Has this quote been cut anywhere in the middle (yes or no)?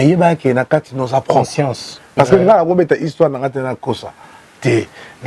yes